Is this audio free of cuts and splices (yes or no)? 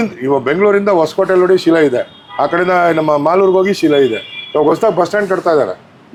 yes